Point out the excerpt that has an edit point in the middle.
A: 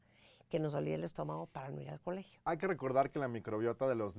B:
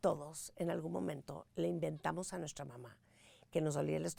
A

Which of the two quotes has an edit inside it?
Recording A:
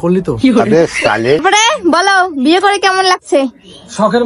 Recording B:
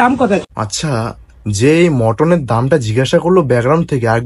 A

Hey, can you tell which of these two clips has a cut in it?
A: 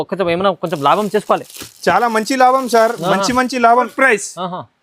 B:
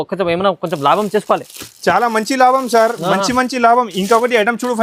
A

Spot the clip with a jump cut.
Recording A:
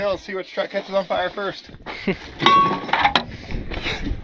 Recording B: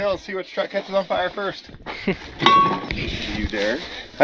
B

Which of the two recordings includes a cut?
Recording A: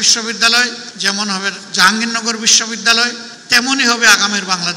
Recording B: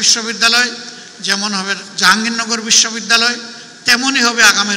A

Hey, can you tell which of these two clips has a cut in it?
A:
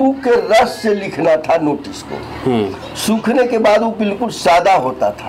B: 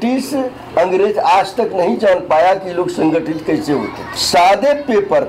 B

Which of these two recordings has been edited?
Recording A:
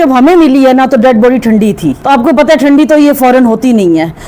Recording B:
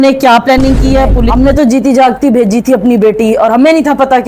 B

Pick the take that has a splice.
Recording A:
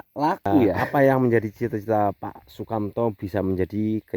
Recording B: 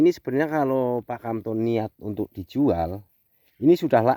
A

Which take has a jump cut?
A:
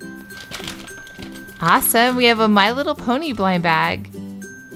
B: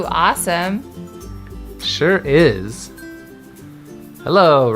B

